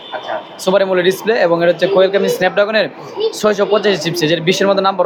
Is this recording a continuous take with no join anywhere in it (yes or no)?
yes